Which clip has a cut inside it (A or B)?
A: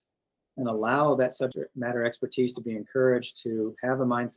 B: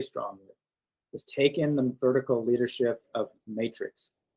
A